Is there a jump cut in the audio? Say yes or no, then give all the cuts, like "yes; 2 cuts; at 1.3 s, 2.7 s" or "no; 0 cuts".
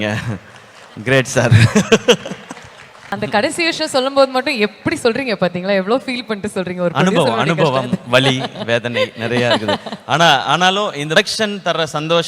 yes; 2 cuts; at 3.1 s, 11.1 s